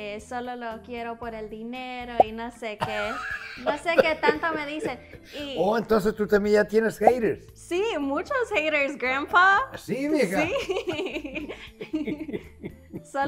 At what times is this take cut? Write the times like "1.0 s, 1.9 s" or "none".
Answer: none